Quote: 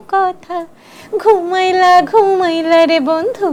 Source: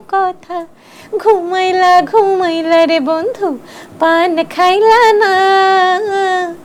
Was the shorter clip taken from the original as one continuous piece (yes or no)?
yes